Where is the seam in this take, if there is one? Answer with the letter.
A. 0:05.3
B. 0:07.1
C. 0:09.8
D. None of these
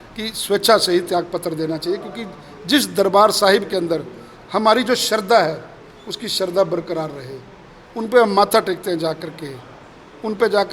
D